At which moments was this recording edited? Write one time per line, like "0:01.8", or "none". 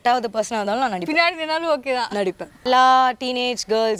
0:02.6